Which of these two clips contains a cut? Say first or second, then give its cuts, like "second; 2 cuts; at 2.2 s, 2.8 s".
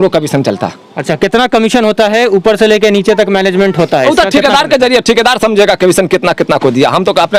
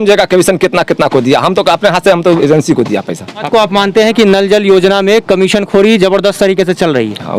second; 1 cut; at 3.5 s